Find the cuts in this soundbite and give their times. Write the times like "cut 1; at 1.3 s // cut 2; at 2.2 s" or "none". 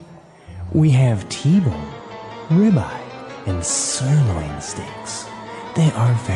none